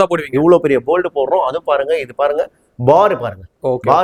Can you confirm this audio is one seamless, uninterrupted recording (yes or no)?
yes